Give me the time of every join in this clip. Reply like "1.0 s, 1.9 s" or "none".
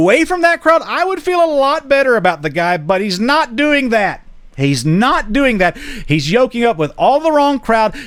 none